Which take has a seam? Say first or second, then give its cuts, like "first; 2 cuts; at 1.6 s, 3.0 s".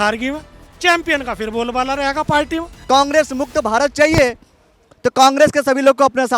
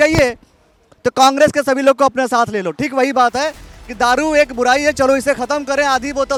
first; 1 cut; at 2.8 s